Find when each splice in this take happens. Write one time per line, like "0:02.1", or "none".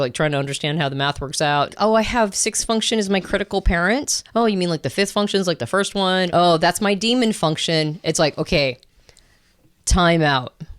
0:01.7
0:04.2
0:06.3